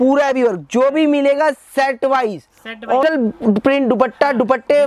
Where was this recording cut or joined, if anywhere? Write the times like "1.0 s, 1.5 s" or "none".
3.0 s